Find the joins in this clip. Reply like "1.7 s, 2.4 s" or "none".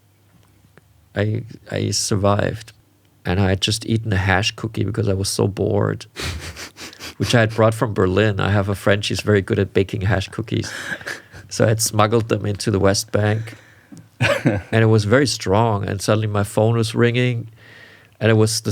2.7 s